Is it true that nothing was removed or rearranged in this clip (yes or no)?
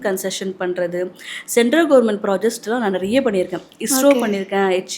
yes